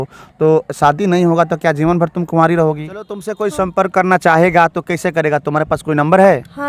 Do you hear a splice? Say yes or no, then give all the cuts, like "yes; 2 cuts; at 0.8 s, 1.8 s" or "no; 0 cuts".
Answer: yes; 1 cut; at 3.3 s